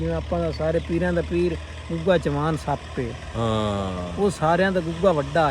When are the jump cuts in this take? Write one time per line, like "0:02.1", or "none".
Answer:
none